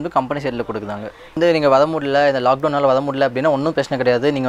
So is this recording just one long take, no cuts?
no; 1 cut; at 1.4 s

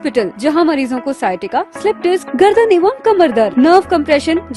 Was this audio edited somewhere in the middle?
no; 0 cuts

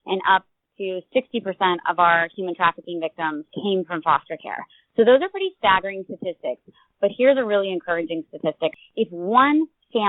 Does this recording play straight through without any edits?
no; 2 cuts; at 3.5 s, 8.7 s

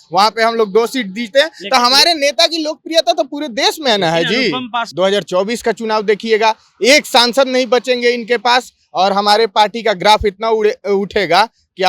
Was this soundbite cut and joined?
yes; 1 cut; at 4.9 s

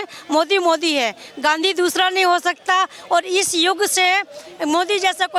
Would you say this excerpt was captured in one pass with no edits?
yes; 0 cuts

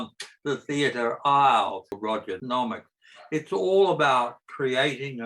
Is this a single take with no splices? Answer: no; 1 cut; at 2.0 s

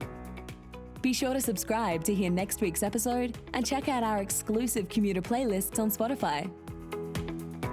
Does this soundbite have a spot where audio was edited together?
yes; 2 cuts; at 0.9 s, 6.7 s

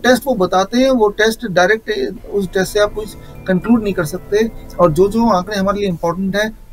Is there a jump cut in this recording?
no; 0 cuts

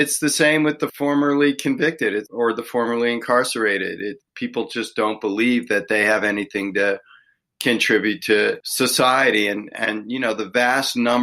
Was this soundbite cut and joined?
yes; 4 cuts; at 0.9 s, 2.3 s, 4.2 s, 8.6 s

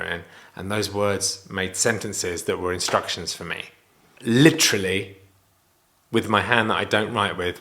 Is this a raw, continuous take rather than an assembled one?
yes; 0 cuts

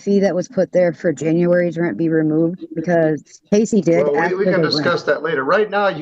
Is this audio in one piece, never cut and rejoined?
yes; 0 cuts

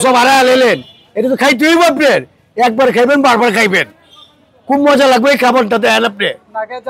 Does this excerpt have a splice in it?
no; 0 cuts

